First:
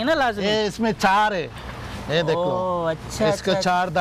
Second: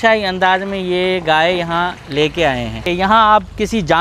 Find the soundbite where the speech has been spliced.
second; 1 cut; at 2.8 s

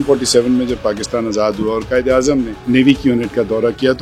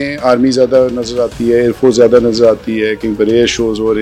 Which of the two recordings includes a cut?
first; 1 cut; at 2.5 s

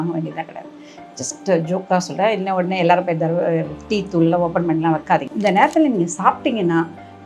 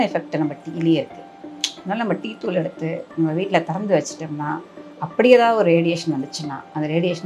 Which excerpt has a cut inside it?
first; 1 cut; at 5.3 s

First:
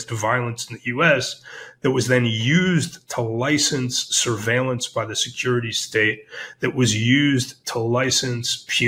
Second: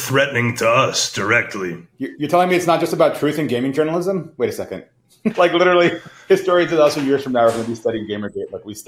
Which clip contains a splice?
second; 2 cuts; at 1.9 s, 5.3 s

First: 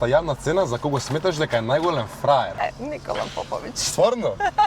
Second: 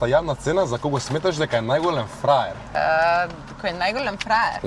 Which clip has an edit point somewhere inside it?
first; 1 cut; at 2.6 s

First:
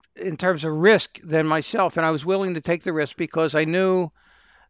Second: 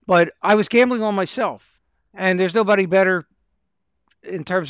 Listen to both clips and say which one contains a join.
second; 1 cut; at 1.7 s

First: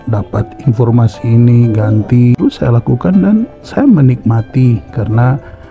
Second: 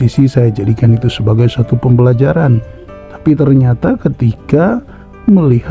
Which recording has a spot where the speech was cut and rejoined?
first; 1 cut; at 2.3 s

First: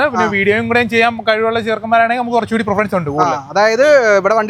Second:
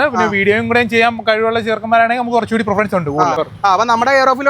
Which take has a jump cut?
second; 1 cut; at 3.4 s

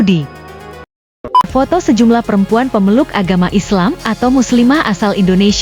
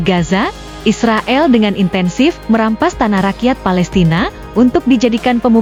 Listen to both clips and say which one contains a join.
first; 1 cut; at 1.2 s

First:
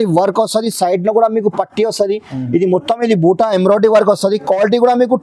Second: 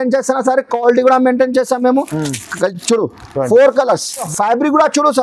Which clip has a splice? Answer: second; 1 cut; at 4.3 s

